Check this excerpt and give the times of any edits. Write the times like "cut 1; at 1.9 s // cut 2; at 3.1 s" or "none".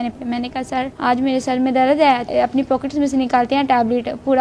cut 1; at 0.9 s // cut 2; at 2.3 s